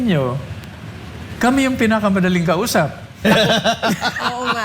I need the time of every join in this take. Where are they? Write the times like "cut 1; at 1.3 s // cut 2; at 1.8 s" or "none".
cut 1; at 3.3 s